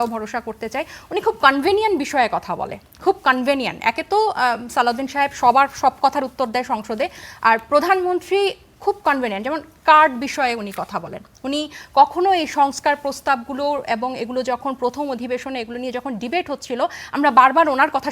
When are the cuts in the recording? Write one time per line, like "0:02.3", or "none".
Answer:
none